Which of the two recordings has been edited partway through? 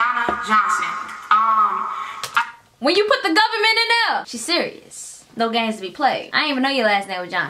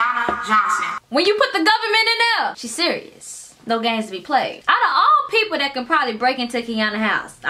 second; 2 cuts; at 0.9 s, 4.6 s

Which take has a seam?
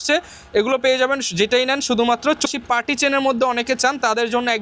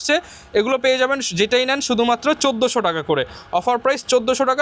first; 1 cut; at 2.5 s

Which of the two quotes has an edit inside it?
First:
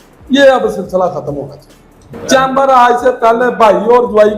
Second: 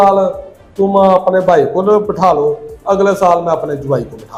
first; 1 cut; at 2.1 s

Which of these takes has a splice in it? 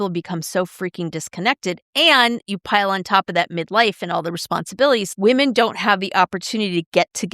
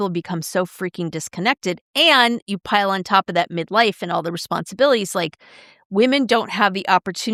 first; 1 cut; at 5.1 s

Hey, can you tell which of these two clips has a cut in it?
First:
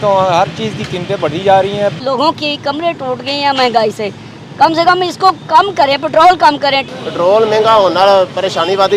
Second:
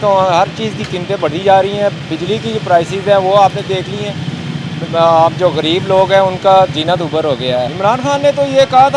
first; 2 cuts; at 2.0 s, 6.8 s

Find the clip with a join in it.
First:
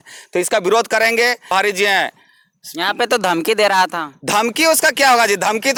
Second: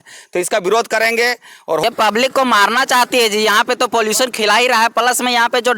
second; 1 cut; at 1.4 s

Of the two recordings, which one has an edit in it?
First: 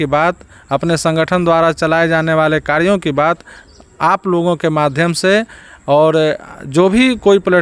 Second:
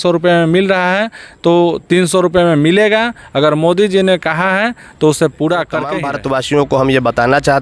second; 1 cut; at 6.0 s

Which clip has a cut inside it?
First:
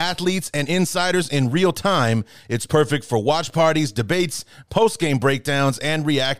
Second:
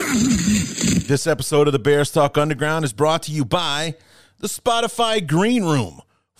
second; 1 cut; at 1.0 s

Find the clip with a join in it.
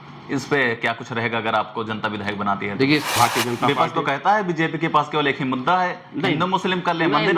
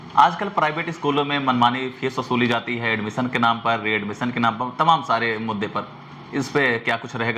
first; 1 cut; at 3.1 s

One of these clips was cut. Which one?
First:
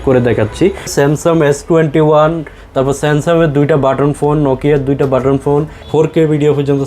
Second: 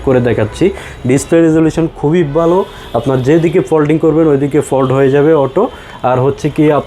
first; 2 cuts; at 0.9 s, 5.8 s

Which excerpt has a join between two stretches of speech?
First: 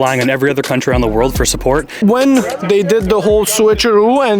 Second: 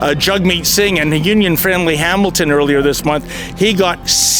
first; 1 cut; at 2.0 s

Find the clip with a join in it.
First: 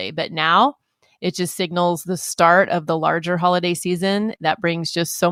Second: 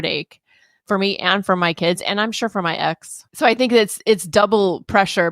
second; 1 cut; at 3.3 s

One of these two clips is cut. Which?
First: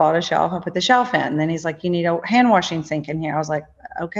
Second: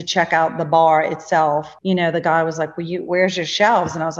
second; 1 cut; at 1.7 s

